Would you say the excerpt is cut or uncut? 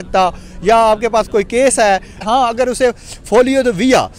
cut